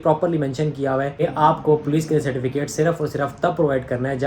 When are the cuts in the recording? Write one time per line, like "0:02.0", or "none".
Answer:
0:01.2

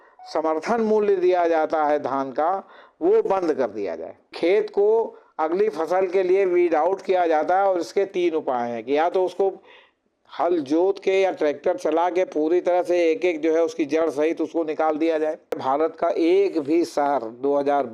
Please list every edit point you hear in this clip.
0:04.3
0:15.6

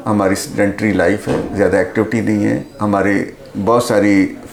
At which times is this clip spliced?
none

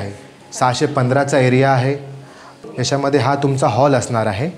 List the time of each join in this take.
none

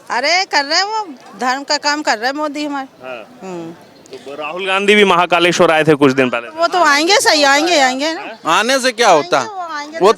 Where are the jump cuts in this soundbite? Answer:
none

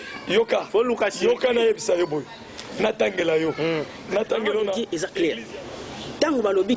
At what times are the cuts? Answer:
0:04.8

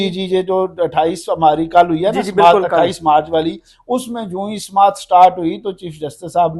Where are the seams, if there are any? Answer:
none

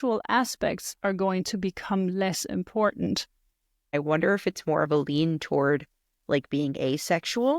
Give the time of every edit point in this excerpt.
0:03.9

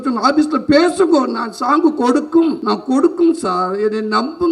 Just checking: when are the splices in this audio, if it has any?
0:02.6

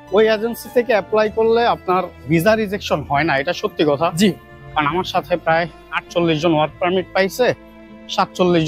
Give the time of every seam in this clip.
none

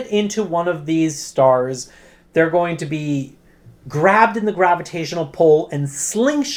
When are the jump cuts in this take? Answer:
none

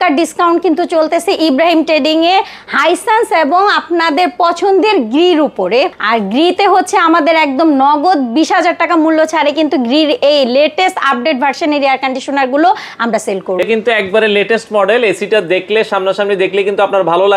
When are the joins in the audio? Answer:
0:06.0
0:13.6

